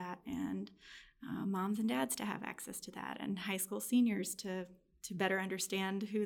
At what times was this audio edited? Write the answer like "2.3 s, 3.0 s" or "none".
none